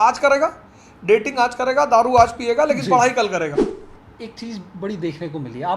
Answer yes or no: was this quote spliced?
yes